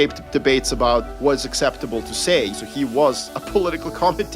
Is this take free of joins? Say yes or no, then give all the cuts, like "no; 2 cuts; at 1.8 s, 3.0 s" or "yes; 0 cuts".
no; 2 cuts; at 1.1 s, 2.5 s